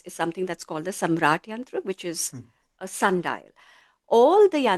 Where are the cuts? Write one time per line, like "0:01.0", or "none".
0:03.9